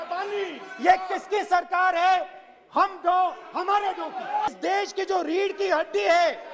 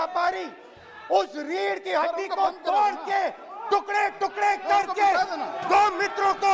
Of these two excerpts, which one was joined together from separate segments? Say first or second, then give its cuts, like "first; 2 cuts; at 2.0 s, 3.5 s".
first; 1 cut; at 4.5 s